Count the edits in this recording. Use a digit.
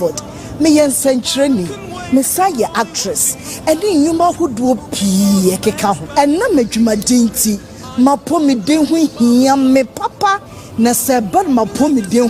0